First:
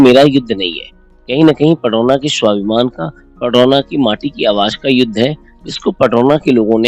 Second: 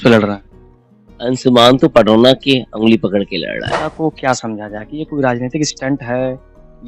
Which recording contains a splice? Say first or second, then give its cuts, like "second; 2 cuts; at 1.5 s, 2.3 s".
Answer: second; 1 cut; at 3.9 s